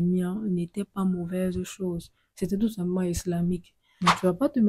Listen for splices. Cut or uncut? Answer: cut